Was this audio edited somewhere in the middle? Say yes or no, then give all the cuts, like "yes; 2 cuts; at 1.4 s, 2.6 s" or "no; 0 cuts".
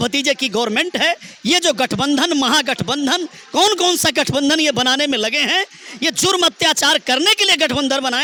no; 0 cuts